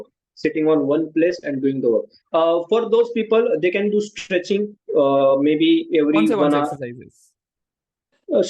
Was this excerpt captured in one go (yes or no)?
no